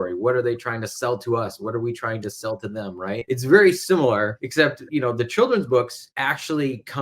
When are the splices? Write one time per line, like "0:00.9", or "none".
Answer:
0:03.2
0:04.4
0:06.0